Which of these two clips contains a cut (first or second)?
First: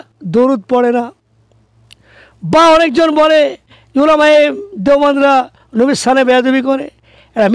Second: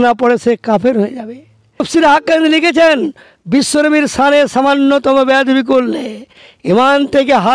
second